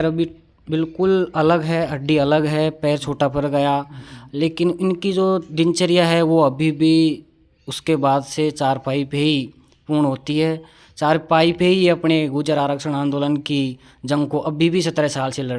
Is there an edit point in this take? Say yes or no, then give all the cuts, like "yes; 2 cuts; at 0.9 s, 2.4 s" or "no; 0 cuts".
no; 0 cuts